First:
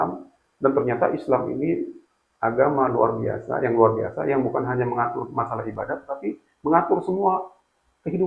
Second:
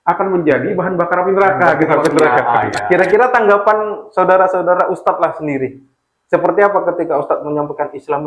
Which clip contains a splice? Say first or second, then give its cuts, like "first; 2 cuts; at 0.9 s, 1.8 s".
second; 1 cut; at 2.8 s